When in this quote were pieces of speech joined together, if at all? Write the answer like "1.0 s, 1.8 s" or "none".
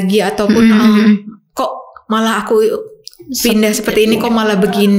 none